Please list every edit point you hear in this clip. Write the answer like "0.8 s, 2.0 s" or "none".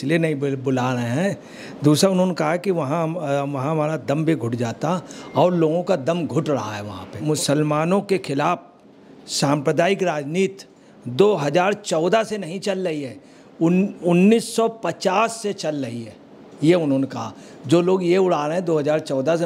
7.1 s